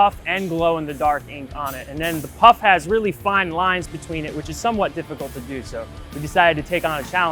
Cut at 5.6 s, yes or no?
no